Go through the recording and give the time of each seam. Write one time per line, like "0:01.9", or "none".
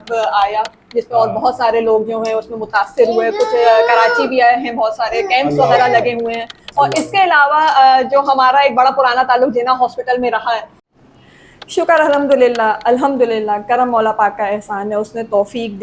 0:10.8